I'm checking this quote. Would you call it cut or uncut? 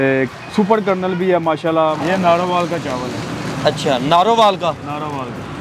cut